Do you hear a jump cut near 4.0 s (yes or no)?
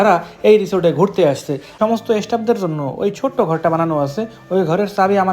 no